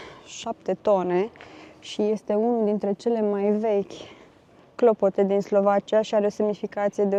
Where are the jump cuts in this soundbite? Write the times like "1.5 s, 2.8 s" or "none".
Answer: none